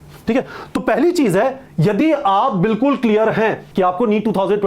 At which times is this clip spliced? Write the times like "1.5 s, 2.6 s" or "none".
3.6 s